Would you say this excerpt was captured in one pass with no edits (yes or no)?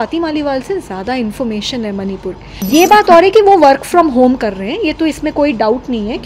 no